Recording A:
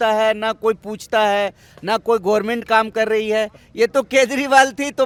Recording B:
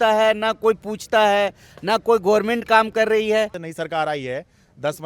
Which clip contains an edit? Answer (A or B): B